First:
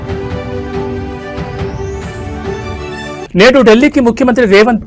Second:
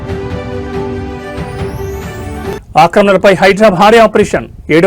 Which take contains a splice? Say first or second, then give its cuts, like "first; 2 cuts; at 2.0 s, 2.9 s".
second; 1 cut; at 2.6 s